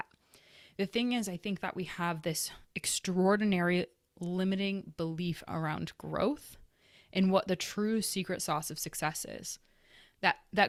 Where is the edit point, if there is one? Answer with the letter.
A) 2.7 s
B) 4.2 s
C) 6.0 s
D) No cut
D